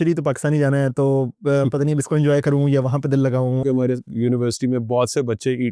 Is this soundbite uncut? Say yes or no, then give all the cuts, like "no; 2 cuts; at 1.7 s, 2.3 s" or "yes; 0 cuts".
no; 1 cut; at 3.6 s